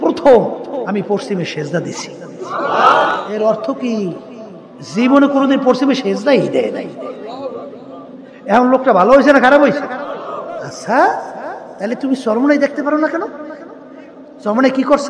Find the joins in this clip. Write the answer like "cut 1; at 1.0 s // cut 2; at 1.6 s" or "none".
cut 1; at 3.1 s // cut 2; at 10.2 s